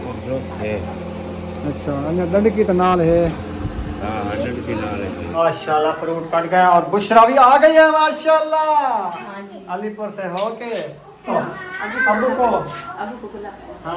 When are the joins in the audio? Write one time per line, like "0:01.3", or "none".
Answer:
0:05.3
0:11.3